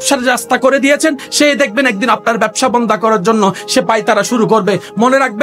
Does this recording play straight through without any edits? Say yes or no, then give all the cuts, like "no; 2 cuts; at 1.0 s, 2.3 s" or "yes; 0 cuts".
yes; 0 cuts